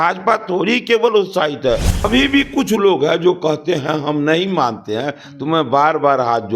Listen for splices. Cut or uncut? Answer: cut